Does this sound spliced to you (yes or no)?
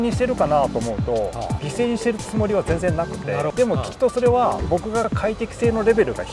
no